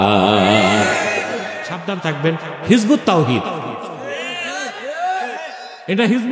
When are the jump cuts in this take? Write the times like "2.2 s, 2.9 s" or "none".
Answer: 1.9 s